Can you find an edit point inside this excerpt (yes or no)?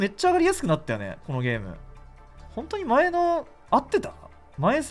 no